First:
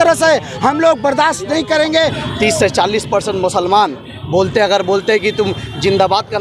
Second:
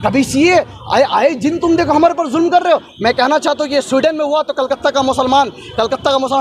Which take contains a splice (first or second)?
first